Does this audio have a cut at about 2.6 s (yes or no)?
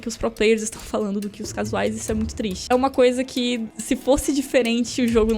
yes